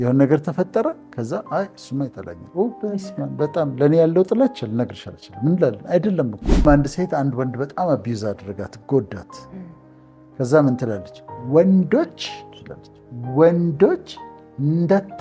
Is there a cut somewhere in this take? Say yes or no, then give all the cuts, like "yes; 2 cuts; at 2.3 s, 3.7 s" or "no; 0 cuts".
yes; 1 cut; at 6.6 s